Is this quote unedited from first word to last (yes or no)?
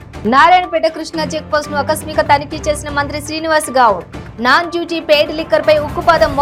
yes